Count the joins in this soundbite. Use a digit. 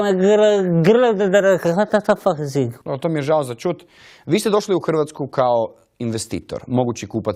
1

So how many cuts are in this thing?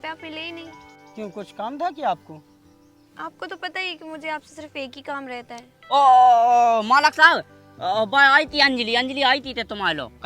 1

